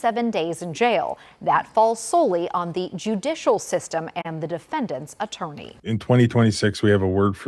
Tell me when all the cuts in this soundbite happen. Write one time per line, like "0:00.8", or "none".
0:05.7